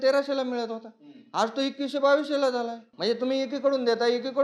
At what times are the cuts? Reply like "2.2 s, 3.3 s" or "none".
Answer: 2.8 s